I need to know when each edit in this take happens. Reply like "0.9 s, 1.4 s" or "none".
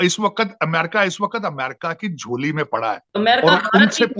3.0 s